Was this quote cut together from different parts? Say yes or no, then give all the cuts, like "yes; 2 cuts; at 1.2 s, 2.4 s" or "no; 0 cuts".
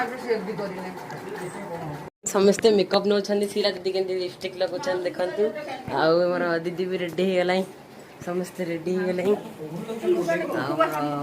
yes; 1 cut; at 2.1 s